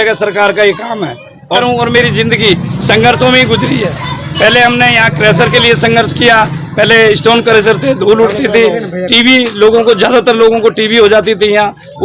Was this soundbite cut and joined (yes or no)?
yes